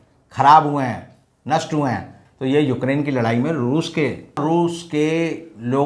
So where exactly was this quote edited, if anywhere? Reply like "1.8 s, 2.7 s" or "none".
4.4 s